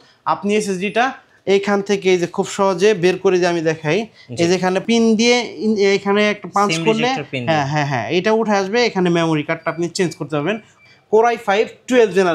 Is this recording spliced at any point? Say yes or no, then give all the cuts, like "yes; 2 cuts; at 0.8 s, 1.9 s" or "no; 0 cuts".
yes; 2 cuts; at 4.8 s, 10.8 s